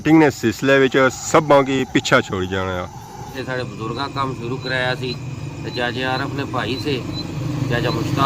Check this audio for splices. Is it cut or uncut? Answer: cut